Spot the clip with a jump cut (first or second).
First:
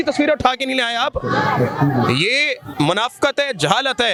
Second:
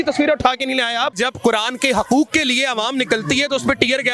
second